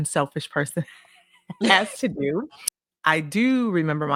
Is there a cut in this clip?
no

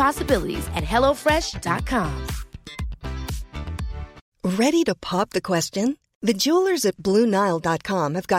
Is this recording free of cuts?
no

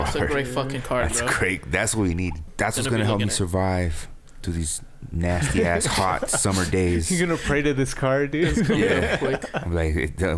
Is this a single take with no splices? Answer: no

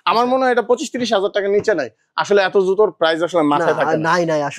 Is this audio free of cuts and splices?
yes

